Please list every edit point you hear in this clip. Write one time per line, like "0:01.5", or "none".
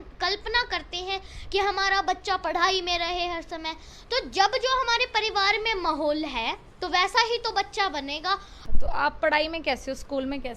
0:08.5